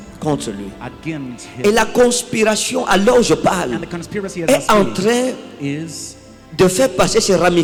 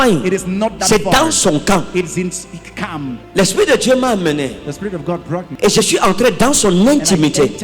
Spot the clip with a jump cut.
second; 2 cuts; at 3.2 s, 5.5 s

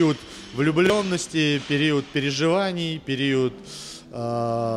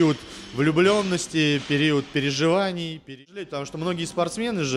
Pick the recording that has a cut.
second; 1 cut; at 3.1 s

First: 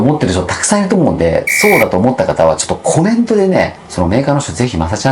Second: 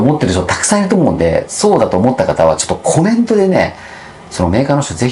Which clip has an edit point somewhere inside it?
first; 1 cut; at 3.8 s

